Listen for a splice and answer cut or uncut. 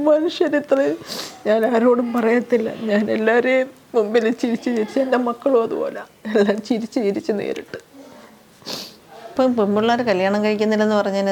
cut